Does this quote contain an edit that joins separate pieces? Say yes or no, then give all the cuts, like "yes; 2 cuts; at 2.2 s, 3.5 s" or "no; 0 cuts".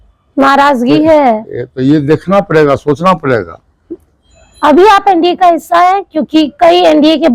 no; 0 cuts